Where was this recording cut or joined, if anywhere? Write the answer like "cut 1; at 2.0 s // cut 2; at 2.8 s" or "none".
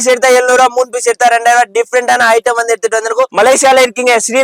cut 1; at 3.3 s